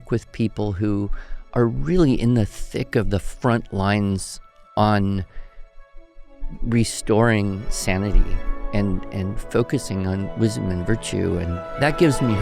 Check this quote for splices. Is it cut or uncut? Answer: cut